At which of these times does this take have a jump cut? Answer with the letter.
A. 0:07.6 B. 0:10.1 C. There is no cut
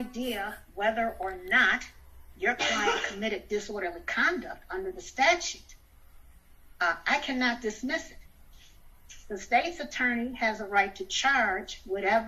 C